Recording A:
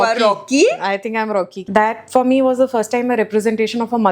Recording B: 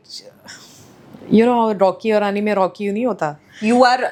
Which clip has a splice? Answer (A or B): A